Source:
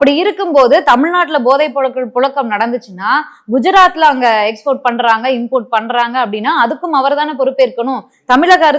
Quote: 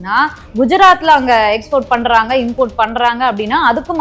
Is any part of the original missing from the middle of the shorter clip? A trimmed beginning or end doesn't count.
no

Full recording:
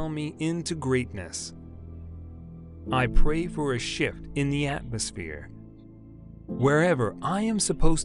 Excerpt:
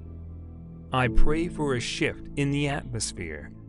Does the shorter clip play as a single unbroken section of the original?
no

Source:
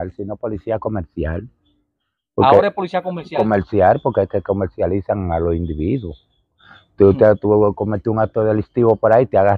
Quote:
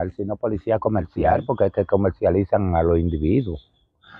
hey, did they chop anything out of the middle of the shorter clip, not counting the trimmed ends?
yes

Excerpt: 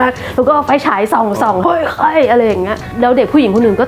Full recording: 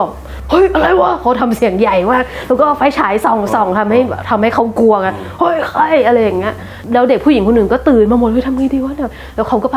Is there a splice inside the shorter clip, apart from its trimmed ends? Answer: yes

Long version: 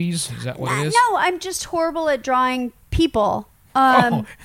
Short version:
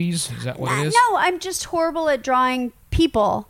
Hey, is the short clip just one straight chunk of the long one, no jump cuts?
yes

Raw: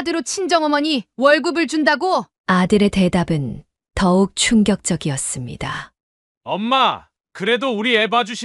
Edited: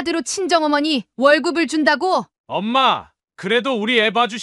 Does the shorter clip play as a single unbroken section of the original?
no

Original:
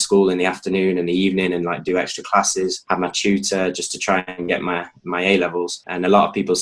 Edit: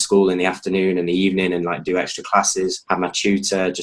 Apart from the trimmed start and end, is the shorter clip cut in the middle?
no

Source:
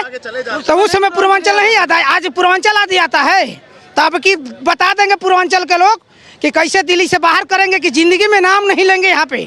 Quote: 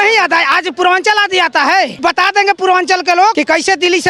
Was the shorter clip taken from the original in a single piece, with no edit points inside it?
no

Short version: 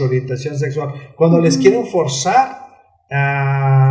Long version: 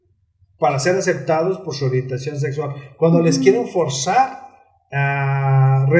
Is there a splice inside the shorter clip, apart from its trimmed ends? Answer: no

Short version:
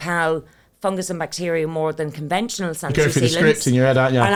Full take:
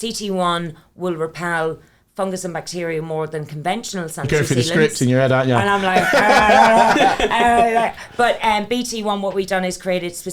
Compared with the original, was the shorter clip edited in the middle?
no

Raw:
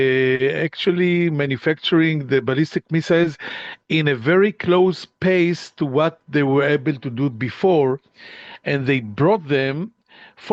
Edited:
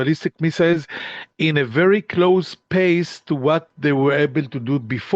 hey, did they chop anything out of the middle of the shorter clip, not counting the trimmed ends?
no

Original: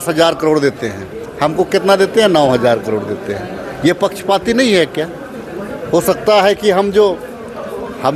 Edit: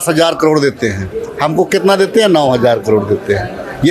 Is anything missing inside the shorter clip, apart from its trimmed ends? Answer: no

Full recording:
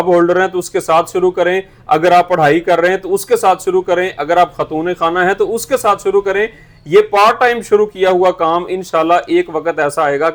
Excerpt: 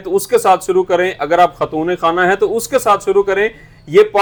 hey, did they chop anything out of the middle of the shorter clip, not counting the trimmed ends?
no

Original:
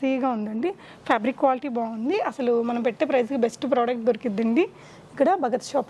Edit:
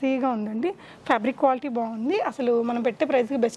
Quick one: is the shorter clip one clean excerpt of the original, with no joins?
yes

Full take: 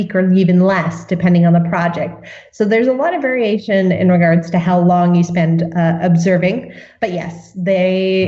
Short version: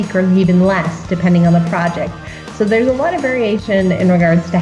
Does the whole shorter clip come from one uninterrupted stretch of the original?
yes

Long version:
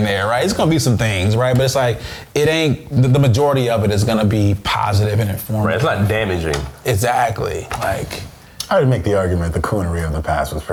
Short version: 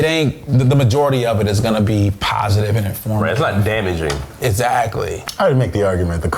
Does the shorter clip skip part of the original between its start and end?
yes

